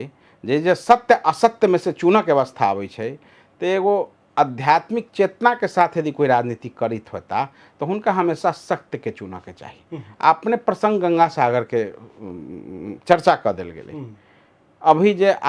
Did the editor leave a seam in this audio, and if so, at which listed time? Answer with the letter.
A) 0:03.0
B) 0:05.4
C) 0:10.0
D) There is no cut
D